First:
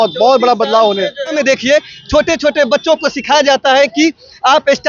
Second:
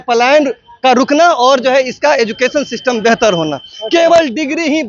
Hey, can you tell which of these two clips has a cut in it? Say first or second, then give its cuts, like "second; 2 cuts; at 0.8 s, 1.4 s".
first; 1 cut; at 1.3 s